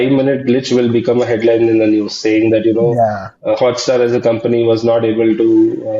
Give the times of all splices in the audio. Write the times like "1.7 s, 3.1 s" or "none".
none